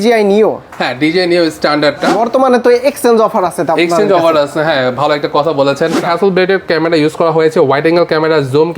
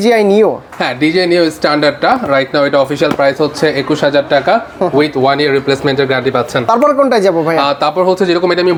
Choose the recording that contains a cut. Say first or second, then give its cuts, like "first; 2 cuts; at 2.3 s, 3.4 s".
first; 2 cuts; at 2.1 s, 6.0 s